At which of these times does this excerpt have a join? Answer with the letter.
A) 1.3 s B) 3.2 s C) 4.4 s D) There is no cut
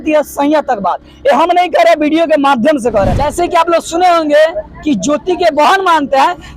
B